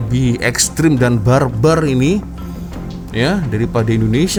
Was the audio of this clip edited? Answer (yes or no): no